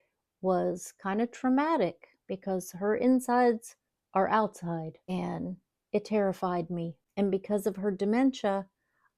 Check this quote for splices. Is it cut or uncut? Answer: uncut